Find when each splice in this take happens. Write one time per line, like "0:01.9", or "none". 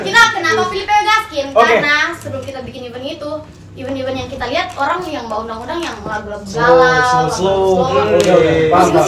none